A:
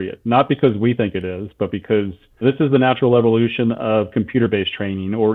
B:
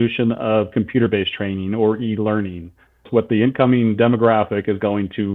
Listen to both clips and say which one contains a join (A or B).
B